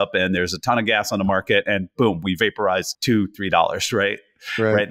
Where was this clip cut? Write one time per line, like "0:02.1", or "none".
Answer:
0:02.9

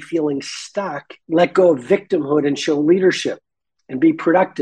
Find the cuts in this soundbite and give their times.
0:01.1

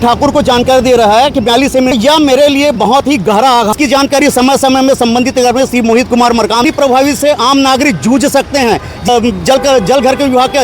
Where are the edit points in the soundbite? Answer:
0:01.9
0:03.7
0:06.7
0:09.1

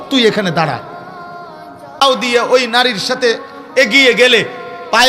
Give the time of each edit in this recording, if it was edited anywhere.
0:02.0

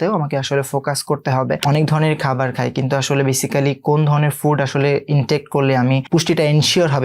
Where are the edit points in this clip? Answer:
0:01.6
0:06.0

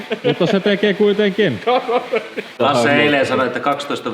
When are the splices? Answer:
0:02.5

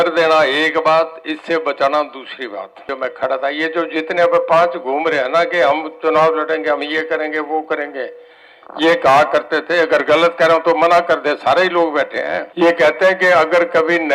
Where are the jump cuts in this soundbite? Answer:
0:02.8
0:12.5

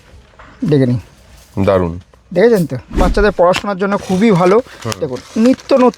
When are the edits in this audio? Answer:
0:03.0

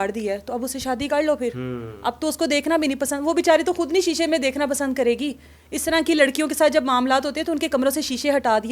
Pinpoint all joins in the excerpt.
none

